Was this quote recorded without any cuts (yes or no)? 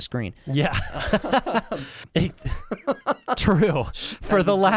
no